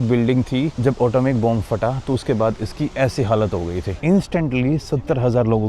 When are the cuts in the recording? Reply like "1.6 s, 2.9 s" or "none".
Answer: 3.9 s

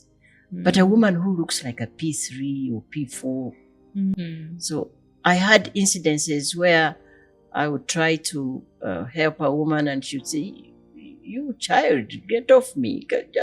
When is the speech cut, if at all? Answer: 4.1 s

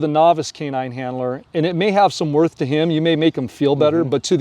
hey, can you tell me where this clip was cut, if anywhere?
1.4 s

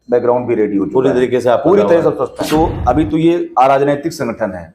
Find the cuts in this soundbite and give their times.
2.5 s

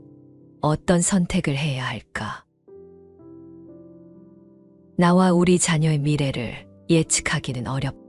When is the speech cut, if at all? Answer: 2.5 s, 4.2 s

